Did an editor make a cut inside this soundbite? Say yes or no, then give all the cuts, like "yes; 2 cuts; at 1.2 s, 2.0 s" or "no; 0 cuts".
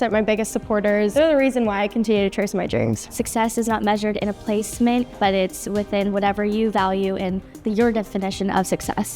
yes; 3 cuts; at 1.1 s, 3.0 s, 5.1 s